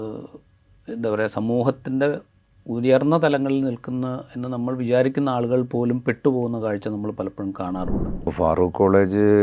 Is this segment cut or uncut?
cut